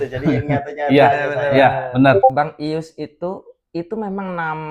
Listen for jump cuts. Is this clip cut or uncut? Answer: cut